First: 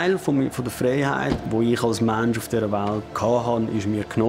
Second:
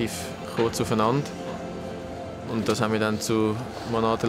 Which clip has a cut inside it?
first; 2 cuts; at 1.4 s, 3.1 s

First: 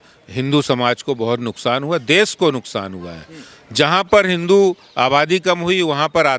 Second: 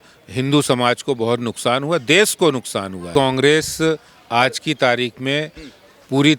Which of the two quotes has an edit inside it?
second; 1 cut; at 3.1 s

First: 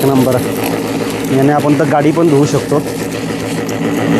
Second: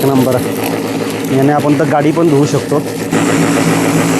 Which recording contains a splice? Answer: second; 1 cut; at 3.1 s

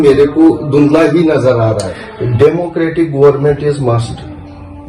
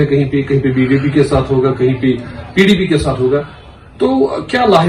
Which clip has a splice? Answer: first; 1 cut; at 1.9 s

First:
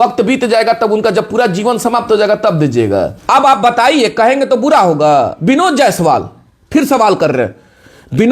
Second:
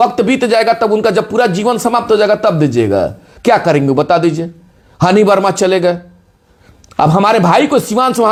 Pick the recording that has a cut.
first; 1 cut; at 3.2 s

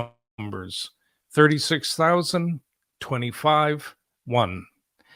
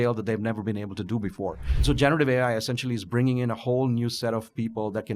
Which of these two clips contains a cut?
second; 1 cut; at 1.7 s

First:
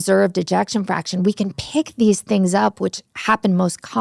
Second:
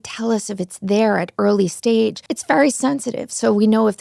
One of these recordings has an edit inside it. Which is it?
second; 1 cut; at 2.3 s

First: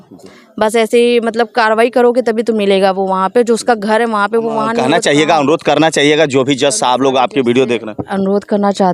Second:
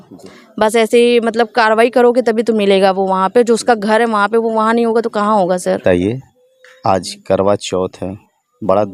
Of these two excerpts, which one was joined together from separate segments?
first; 1 cut; at 4.7 s

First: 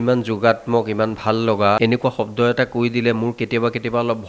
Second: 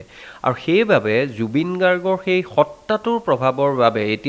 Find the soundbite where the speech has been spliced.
first; 1 cut; at 1.8 s

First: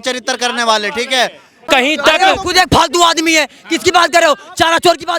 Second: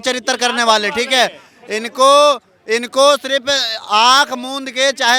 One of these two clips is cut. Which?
first; 1 cut; at 1.5 s

